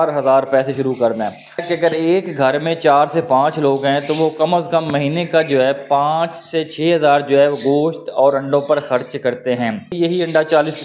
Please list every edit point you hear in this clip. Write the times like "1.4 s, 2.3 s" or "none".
1.7 s, 10.0 s